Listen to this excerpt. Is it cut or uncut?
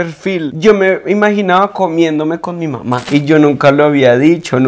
cut